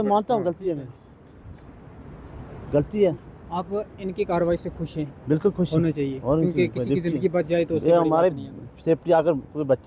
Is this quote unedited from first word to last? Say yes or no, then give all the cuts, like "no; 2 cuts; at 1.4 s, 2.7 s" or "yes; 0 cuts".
yes; 0 cuts